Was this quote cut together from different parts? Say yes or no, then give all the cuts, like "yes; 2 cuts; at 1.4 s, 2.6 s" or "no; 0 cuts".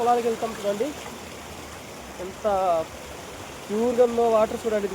no; 0 cuts